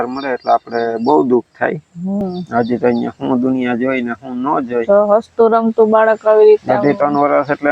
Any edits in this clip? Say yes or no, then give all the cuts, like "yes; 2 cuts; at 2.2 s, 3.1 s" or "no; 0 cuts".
yes; 1 cut; at 2.2 s